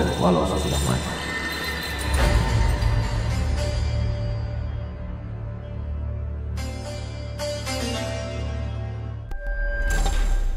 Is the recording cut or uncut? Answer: uncut